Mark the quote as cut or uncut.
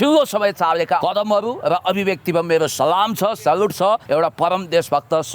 cut